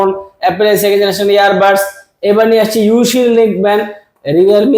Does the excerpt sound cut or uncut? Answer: uncut